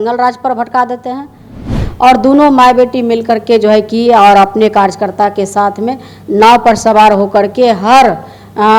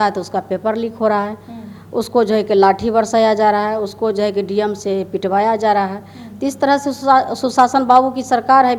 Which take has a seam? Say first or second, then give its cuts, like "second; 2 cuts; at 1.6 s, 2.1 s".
first; 1 cut; at 1.8 s